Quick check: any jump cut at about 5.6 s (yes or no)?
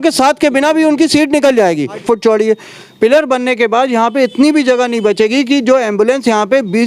no